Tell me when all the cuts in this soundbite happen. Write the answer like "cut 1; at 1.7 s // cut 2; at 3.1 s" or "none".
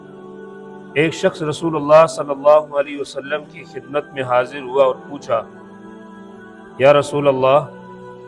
cut 1; at 0.9 s